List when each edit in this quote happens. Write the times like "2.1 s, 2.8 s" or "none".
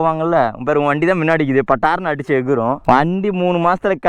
2.8 s